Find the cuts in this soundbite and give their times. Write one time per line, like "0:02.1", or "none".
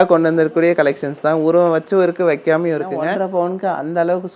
0:03.0

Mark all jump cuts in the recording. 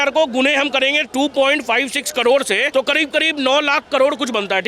0:02.7

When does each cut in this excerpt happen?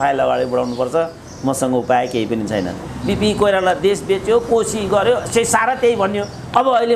0:02.9

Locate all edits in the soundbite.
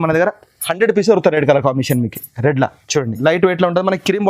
0:03.2

